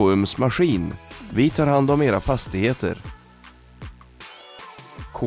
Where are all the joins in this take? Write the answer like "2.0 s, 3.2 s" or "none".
none